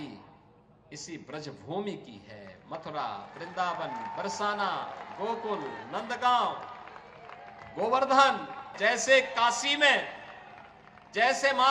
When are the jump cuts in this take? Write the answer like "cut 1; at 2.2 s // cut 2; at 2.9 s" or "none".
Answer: cut 1; at 8.7 s